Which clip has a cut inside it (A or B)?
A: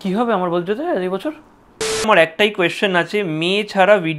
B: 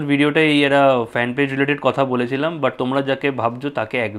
A